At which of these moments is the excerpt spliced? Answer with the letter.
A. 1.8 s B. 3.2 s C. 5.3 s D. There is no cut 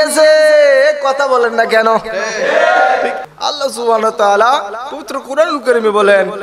B